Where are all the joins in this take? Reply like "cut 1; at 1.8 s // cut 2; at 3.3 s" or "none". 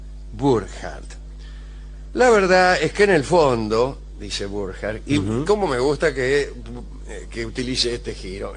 cut 1; at 2.7 s